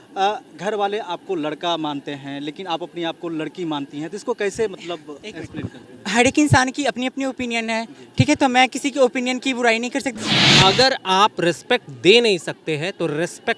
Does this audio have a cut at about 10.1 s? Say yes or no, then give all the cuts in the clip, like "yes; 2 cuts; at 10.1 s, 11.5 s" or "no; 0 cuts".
yes; 1 cut; at 10.1 s